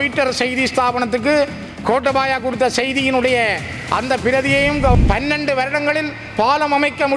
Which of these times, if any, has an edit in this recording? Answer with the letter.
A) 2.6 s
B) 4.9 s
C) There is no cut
B